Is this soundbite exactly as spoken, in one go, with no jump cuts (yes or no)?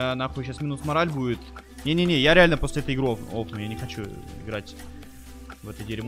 yes